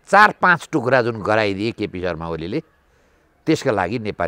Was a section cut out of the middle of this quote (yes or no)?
no